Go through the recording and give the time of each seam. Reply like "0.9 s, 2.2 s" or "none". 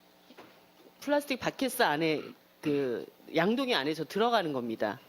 1.2 s

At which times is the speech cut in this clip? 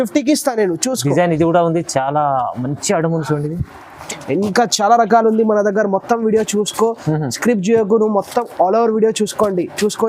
4.0 s

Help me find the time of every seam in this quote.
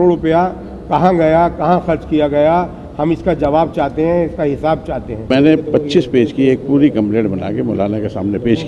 5.3 s

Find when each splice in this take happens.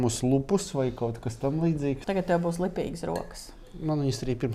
2.0 s

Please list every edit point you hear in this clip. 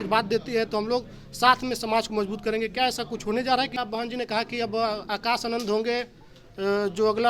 3.8 s

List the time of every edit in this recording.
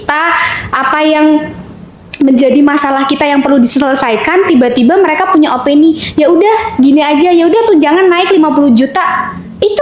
none

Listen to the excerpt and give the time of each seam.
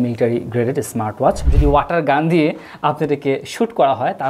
1.4 s

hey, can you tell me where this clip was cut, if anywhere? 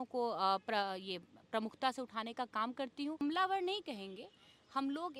3.2 s

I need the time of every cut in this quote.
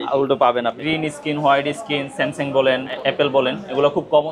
0.8 s, 2.9 s

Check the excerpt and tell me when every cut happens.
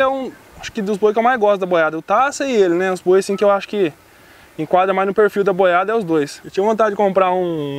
6.4 s

